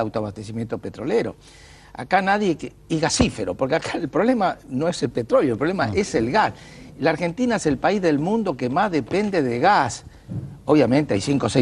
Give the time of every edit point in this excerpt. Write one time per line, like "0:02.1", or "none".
none

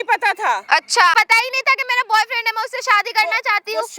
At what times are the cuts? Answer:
0:01.1

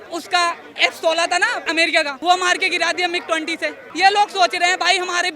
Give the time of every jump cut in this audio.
0:02.1
0:03.8

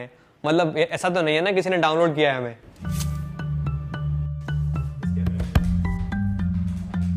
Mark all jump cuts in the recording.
none

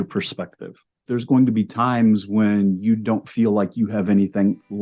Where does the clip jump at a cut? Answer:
0:01.1

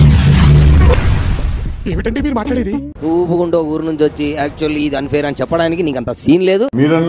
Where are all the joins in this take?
none

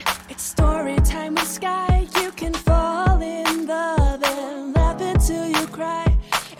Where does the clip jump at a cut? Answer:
none

